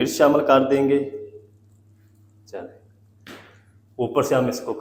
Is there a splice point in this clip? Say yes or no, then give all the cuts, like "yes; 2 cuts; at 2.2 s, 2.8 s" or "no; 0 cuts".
no; 0 cuts